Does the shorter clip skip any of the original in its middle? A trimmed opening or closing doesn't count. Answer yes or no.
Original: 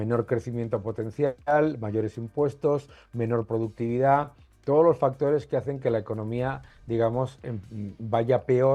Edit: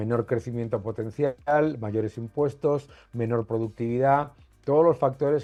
no